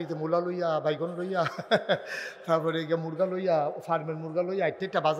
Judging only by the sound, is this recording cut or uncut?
uncut